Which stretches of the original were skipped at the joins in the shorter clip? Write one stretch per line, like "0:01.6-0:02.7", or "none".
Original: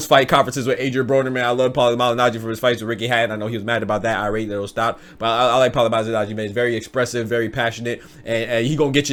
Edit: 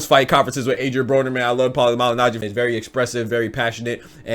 0:02.4-0:06.4

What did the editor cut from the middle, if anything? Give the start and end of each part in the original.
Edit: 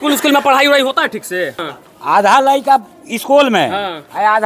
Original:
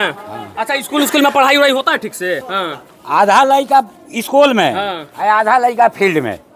0:02.5-0:02.6

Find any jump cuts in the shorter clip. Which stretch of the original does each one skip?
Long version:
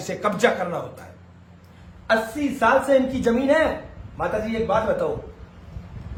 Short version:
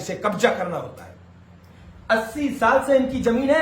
none

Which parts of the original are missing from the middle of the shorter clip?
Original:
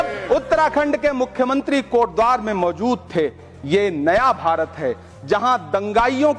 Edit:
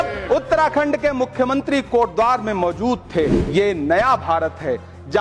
0:03.4-0:03.6

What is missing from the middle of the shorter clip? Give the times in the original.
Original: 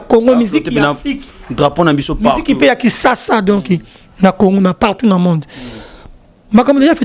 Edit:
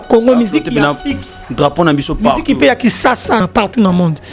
0:03.4-0:04.7

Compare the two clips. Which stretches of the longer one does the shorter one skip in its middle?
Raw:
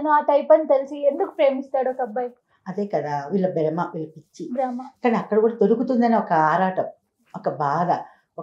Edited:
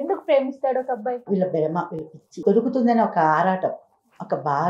0:02.3-0:03.3
0:04.4-0:05.5

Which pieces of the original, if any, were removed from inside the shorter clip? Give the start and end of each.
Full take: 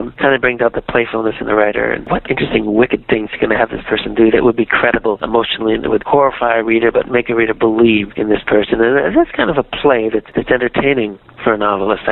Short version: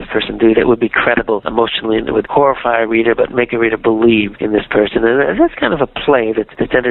none

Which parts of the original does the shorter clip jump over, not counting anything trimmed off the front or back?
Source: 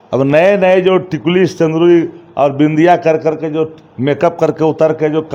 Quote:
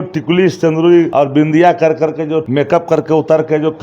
0:02.1-0:02.3
0:03.7-0:04.0

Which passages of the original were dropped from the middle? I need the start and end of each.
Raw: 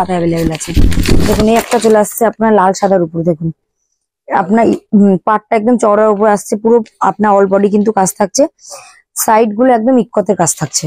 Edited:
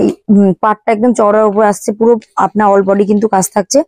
none

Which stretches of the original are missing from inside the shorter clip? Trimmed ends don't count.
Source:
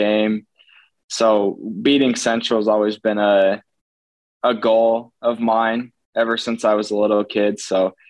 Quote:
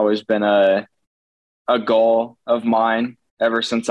none

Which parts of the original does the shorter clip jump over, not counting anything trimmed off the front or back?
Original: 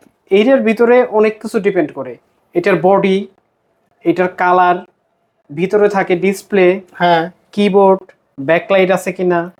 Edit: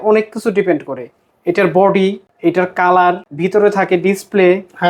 0:03.3-0:03.9
0:04.9-0:05.5

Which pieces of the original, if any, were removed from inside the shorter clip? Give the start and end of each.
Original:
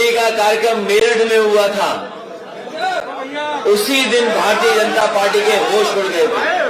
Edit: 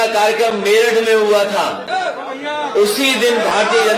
0:02.1-0:02.7

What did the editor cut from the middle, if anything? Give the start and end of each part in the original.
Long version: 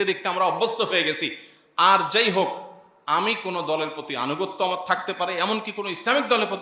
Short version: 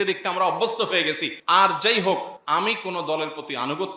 0:01.3-0:01.6
0:02.7-0:03.0

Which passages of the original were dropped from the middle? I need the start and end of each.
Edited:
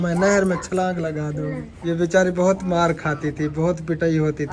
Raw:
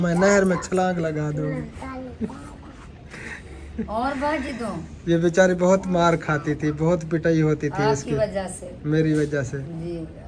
0:01.7-0:04.9

